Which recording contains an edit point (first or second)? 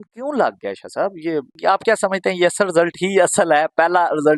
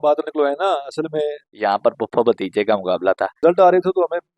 second